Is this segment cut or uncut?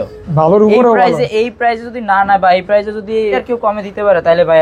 cut